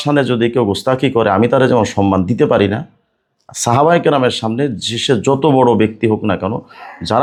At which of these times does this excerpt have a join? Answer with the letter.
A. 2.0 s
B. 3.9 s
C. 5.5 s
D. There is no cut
D